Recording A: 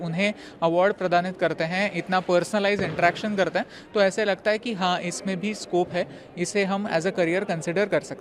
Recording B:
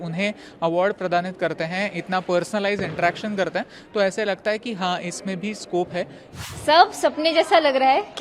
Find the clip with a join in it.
B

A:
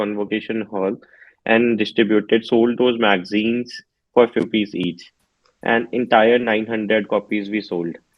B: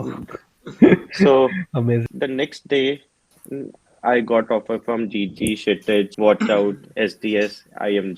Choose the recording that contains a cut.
B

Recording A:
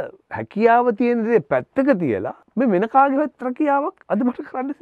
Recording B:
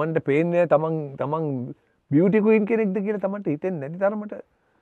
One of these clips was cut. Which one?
A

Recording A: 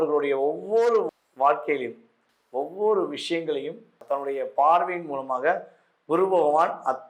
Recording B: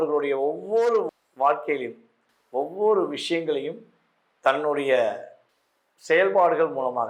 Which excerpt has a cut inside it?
A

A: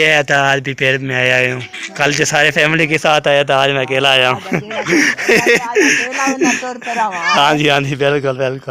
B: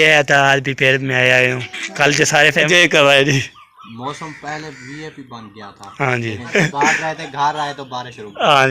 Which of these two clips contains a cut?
B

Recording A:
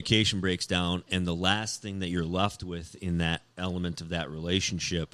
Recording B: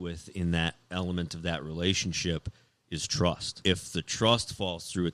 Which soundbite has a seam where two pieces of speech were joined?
B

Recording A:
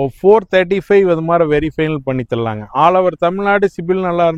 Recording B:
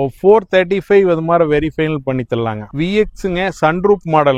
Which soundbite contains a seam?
B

